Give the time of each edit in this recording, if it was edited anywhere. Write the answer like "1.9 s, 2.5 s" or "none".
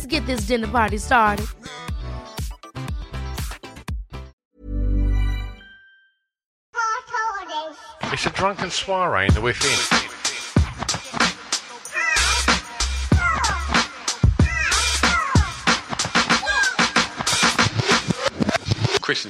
4.4 s, 6.6 s